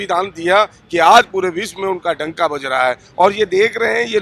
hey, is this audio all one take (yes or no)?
yes